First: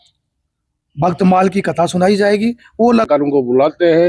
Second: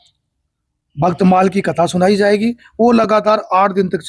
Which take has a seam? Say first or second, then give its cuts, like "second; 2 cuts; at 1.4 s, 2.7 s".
first; 1 cut; at 3.1 s